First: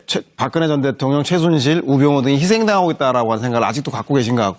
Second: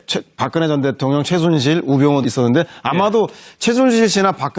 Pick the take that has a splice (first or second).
first